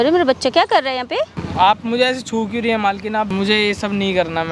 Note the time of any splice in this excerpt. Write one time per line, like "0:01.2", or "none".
0:01.4
0:03.3